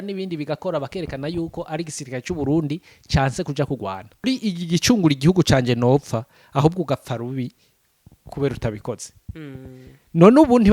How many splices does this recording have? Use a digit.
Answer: 1